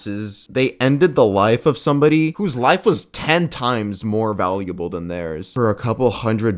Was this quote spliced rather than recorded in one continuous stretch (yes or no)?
no